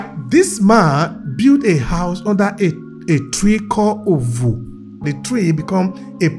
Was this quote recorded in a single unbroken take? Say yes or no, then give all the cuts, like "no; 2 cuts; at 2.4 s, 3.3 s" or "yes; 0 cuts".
no; 1 cut; at 5.1 s